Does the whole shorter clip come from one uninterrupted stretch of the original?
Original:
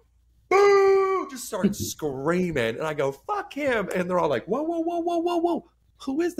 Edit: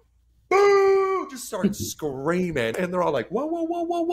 no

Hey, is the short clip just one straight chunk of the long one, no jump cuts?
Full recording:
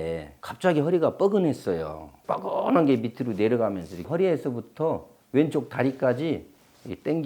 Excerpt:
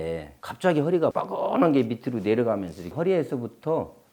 no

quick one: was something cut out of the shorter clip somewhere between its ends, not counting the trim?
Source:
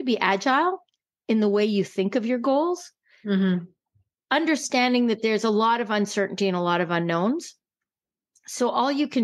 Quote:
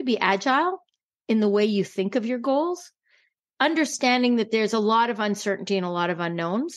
yes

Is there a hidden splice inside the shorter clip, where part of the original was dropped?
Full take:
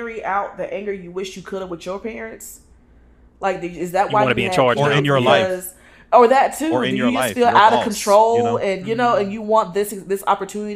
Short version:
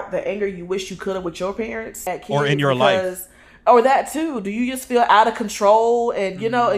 yes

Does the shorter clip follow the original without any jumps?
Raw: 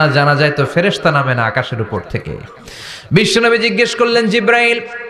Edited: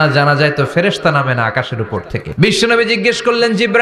no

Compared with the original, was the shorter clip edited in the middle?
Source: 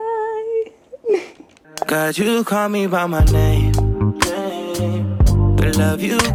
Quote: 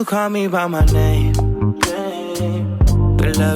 no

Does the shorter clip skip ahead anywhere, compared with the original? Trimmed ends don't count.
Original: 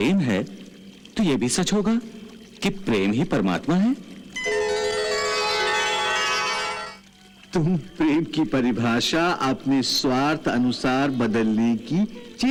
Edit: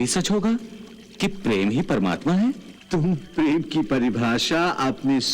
yes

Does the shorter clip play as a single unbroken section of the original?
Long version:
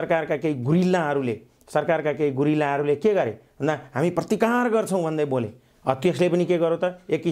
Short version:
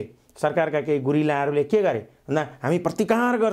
yes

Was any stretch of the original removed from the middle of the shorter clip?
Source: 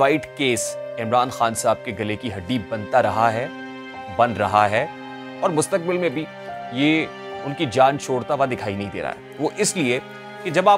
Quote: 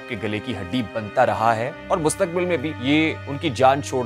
yes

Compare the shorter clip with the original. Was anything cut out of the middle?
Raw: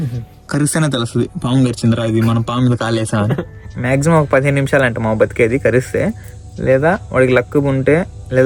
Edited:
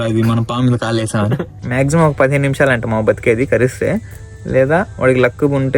yes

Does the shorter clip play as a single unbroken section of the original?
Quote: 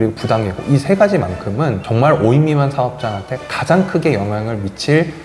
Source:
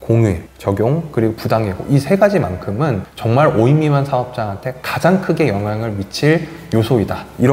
no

